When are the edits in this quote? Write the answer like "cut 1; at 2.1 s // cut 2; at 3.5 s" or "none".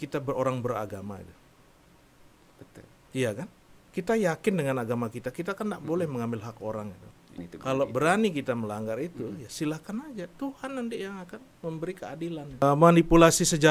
cut 1; at 7.4 s // cut 2; at 12.6 s